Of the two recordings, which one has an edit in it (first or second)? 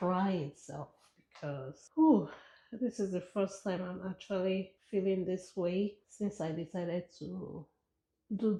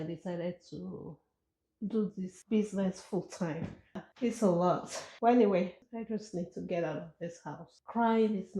second